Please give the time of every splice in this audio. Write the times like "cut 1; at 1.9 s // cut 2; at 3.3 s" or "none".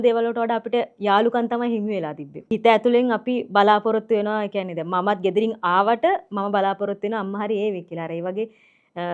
cut 1; at 2.5 s